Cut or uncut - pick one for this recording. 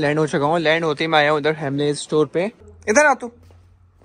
cut